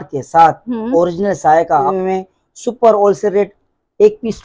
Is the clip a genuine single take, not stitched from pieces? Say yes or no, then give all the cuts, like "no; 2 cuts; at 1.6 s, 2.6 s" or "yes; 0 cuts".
no; 1 cut; at 1.9 s